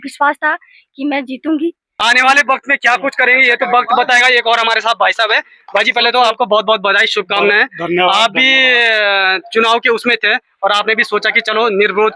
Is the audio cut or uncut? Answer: cut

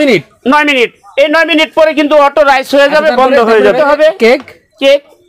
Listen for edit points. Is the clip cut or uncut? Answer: cut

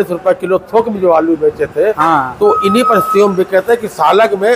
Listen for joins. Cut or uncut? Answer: uncut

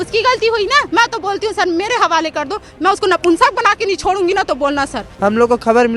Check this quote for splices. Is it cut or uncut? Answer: cut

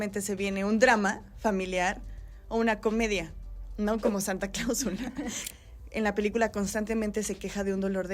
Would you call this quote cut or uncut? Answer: cut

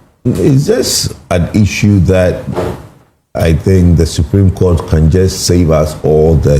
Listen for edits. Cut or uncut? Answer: uncut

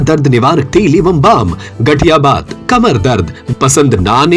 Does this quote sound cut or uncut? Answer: cut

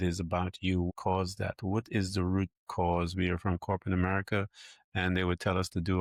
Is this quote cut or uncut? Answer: uncut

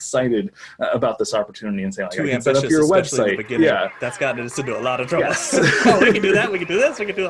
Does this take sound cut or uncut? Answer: uncut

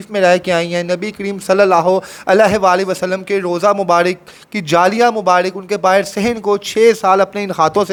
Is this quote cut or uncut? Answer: uncut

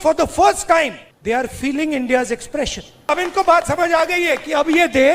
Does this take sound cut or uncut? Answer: cut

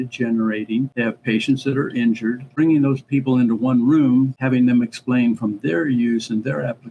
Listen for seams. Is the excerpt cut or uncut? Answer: cut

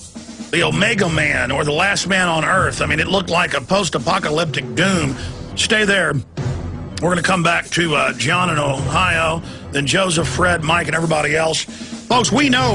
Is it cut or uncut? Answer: cut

